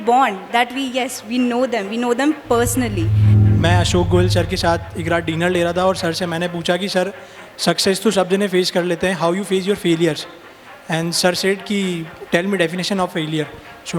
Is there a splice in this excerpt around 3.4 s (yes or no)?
yes